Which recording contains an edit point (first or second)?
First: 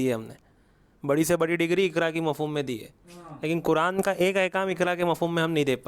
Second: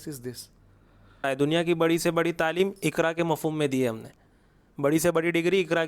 second